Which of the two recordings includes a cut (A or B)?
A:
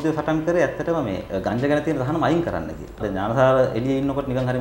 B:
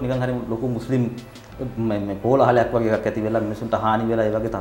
A